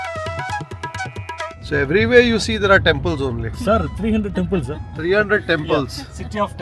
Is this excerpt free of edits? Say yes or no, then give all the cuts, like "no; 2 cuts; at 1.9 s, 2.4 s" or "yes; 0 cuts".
yes; 0 cuts